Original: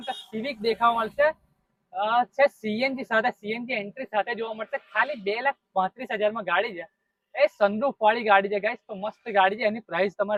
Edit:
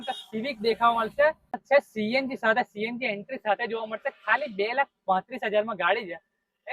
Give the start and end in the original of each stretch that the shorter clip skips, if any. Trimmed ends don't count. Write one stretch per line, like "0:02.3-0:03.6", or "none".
0:01.6-0:02.3

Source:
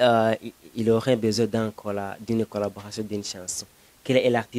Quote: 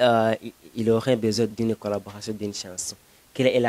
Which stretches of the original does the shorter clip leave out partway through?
0:01.5-0:02.2

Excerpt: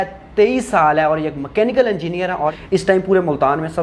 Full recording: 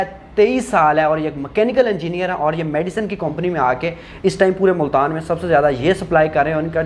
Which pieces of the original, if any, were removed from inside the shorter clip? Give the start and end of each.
0:02.6-0:04.1

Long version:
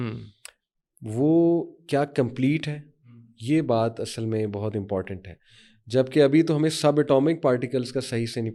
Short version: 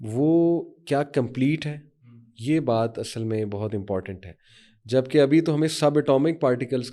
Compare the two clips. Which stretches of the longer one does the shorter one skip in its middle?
none

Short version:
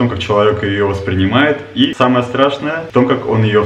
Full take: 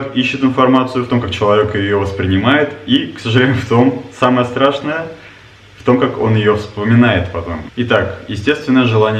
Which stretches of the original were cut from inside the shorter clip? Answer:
0:03.0-0:04.1
0:05.0-0:05.7

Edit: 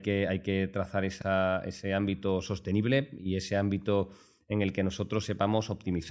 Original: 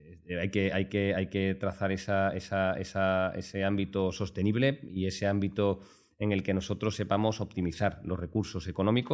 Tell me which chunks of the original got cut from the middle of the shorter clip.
0:02.0-0:02.9

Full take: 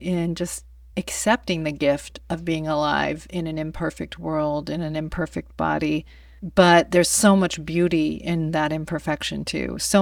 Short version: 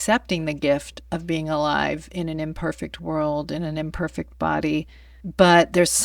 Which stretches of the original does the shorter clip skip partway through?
none

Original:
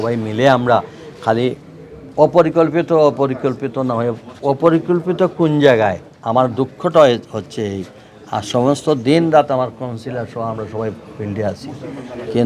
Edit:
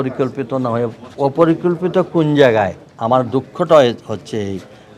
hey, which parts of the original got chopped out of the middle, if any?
none

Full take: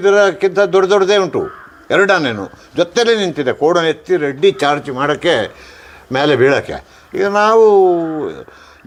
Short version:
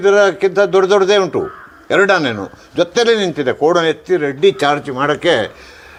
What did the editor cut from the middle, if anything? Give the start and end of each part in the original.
none

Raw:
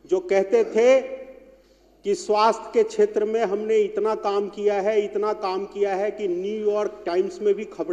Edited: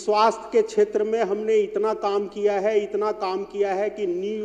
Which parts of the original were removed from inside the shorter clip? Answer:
none

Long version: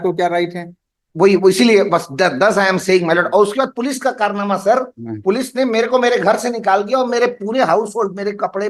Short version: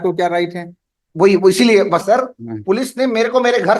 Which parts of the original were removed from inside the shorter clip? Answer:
0:02.0-0:04.6

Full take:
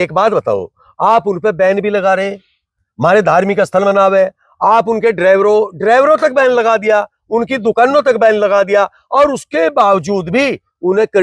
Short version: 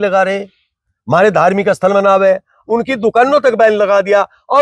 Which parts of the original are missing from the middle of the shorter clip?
0:04.5-0:07.2

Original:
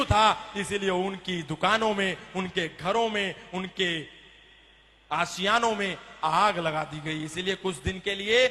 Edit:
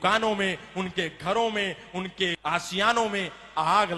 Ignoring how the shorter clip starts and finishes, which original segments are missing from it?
0:04.0-0:05.0

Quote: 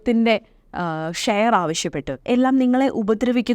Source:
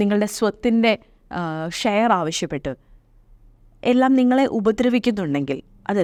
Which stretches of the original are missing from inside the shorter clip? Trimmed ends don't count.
0:02.7-0:03.7

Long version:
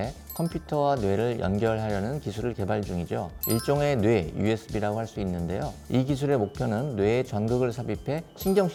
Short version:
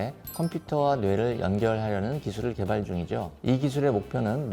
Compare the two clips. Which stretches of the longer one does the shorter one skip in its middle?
0:03.3-0:05.8

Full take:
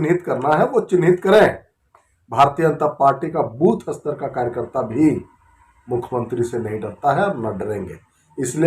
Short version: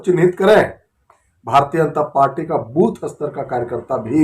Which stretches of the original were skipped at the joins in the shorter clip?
none

